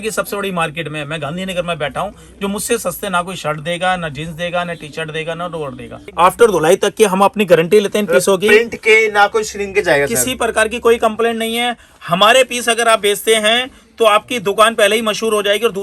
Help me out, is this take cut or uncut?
cut